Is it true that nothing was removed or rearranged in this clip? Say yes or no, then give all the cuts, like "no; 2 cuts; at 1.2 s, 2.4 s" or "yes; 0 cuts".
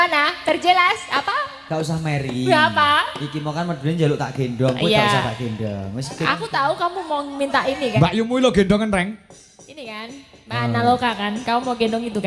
yes; 0 cuts